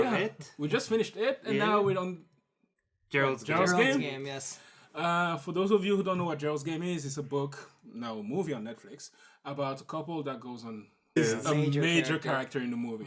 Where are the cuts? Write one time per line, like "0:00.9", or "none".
none